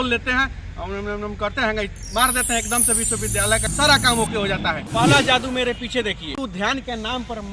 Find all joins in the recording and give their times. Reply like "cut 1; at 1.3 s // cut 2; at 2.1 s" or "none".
cut 1; at 3.7 s // cut 2; at 4.8 s // cut 3; at 6.4 s